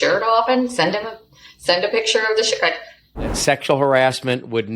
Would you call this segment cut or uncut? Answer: cut